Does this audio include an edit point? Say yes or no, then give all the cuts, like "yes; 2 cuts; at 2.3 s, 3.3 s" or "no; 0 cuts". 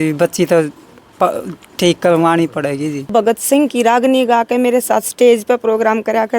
yes; 1 cut; at 3.1 s